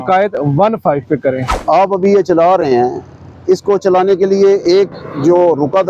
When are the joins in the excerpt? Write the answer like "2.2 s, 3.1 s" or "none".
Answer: 1.5 s